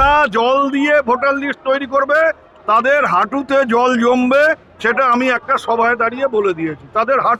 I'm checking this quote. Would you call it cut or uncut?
uncut